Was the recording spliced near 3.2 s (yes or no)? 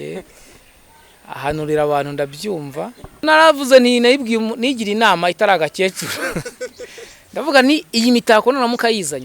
yes